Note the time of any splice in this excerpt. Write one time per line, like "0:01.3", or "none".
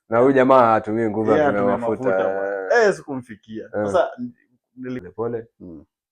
0:05.0